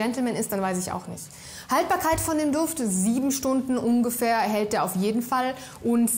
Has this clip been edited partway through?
no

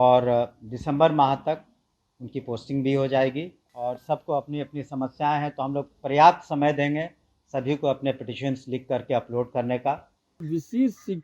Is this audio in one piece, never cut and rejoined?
no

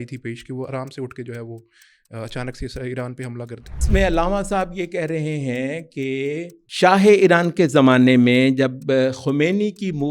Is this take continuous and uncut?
no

